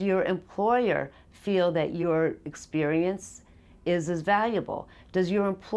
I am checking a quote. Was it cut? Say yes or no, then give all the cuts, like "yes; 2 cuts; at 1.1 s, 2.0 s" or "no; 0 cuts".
yes; 1 cut; at 2.0 s